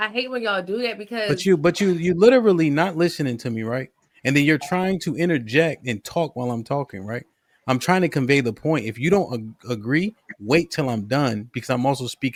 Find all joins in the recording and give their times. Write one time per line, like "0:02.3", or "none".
none